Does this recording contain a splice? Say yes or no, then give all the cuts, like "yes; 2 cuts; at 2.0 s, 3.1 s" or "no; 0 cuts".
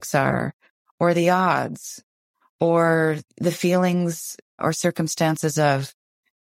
yes; 2 cuts; at 3.3 s, 4.6 s